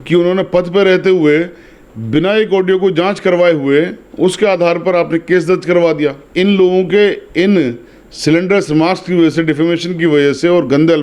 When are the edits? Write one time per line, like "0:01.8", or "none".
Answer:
0:06.2